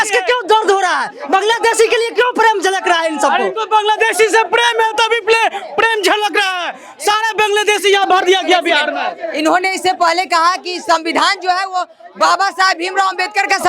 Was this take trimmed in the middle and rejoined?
no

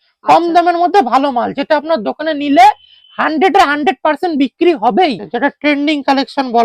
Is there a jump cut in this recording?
yes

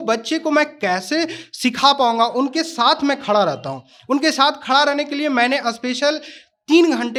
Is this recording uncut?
yes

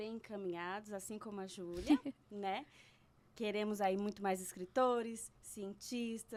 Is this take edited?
no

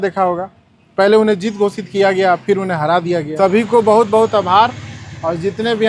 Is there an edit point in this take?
yes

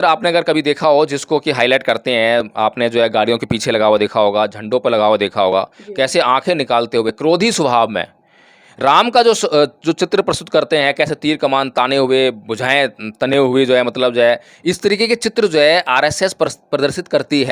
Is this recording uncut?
yes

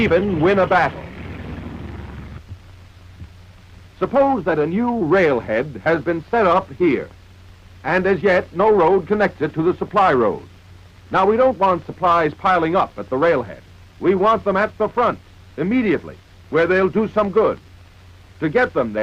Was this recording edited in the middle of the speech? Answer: yes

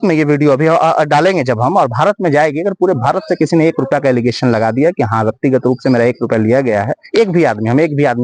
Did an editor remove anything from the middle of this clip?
no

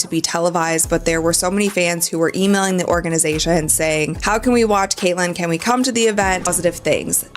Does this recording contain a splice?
yes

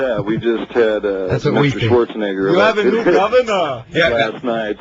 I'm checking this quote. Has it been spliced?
yes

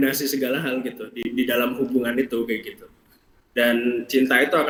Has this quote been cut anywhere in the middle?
no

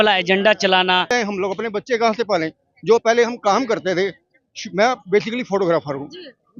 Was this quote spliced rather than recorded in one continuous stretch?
yes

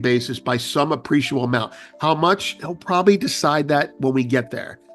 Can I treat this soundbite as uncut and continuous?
yes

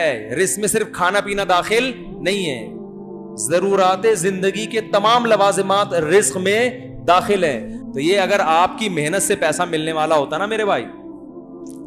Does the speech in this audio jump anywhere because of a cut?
yes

